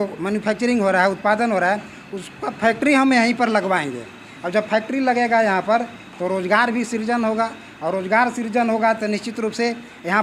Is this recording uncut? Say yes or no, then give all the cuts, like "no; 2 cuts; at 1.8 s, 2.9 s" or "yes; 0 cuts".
yes; 0 cuts